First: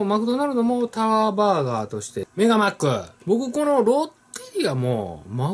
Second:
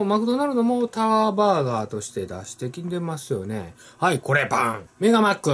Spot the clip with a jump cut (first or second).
first